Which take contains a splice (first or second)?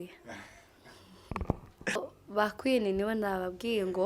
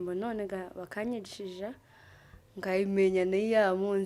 first